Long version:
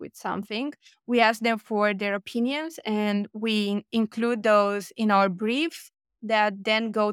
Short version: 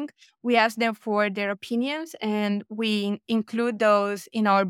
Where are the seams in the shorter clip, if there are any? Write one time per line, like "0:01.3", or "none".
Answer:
none